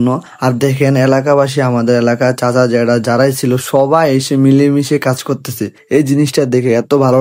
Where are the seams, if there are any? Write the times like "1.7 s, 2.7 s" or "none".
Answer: none